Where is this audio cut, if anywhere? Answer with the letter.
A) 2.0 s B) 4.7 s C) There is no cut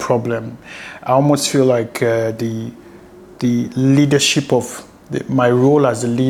C